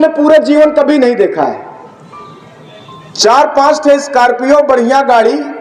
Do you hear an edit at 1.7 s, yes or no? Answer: no